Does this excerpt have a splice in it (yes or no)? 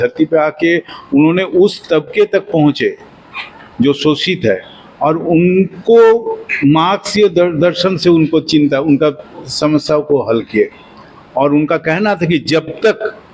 no